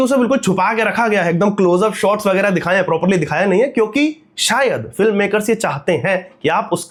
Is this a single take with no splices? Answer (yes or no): yes